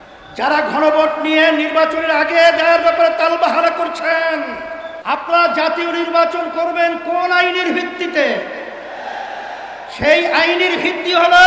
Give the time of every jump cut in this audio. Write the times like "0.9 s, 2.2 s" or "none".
4.9 s